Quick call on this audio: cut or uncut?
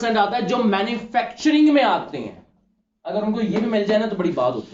uncut